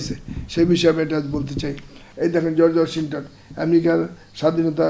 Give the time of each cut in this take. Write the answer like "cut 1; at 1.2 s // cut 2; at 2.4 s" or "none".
cut 1; at 2.0 s